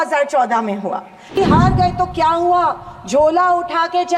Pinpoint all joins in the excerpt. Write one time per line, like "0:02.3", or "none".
0:01.3